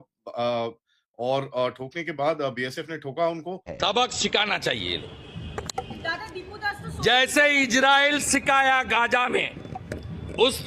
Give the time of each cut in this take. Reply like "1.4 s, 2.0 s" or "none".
3.7 s